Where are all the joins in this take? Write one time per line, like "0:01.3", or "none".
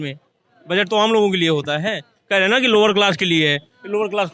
none